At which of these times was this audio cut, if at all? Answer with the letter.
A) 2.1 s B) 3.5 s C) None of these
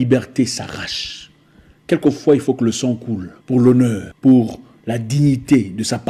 C